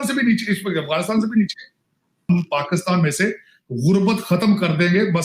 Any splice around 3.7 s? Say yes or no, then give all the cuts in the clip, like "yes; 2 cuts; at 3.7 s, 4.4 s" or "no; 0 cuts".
no; 1 cut; at 2.2 s